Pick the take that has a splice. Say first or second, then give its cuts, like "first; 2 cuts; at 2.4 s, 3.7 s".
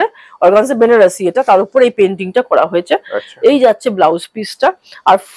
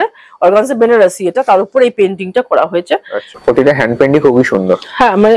second; 1 cut; at 3.2 s